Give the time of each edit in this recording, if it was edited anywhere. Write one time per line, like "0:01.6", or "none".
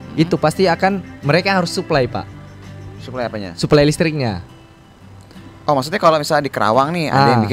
none